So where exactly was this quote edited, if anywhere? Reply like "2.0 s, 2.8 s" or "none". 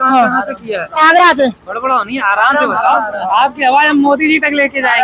none